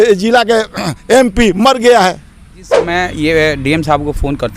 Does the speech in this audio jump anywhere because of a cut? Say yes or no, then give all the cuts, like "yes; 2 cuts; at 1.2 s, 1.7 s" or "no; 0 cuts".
yes; 1 cut; at 2.7 s